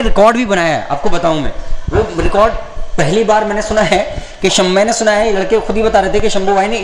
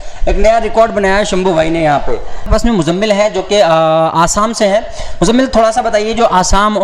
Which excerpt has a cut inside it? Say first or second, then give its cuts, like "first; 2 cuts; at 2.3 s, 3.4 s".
second; 1 cut; at 2.5 s